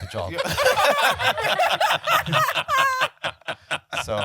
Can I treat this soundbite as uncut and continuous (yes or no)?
yes